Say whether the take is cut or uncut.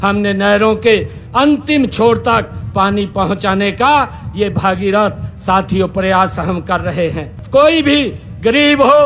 cut